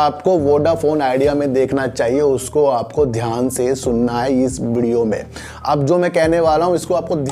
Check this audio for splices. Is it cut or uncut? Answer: uncut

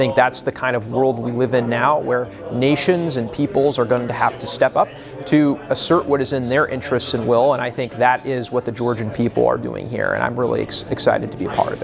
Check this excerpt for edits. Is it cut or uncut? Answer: uncut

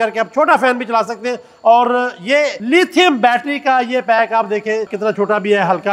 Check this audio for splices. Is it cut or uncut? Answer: cut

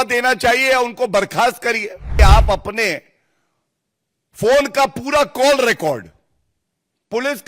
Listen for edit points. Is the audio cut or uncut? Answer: cut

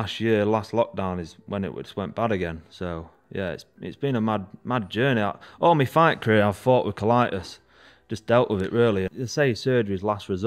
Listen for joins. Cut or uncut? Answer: cut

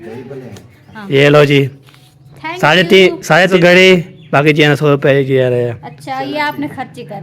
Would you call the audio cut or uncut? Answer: cut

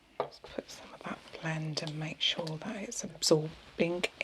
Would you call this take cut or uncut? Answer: cut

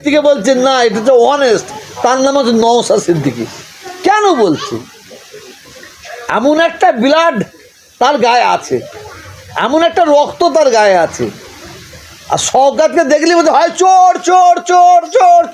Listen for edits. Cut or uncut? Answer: uncut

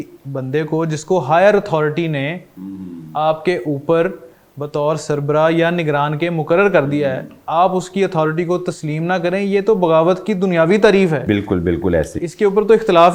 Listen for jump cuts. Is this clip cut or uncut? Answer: uncut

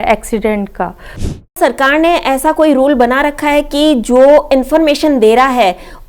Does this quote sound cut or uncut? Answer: cut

